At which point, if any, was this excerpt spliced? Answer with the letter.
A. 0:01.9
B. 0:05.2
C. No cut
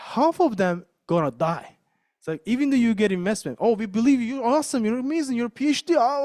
C